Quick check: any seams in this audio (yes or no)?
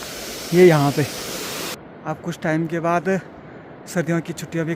yes